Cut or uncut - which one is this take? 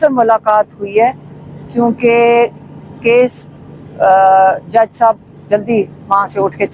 uncut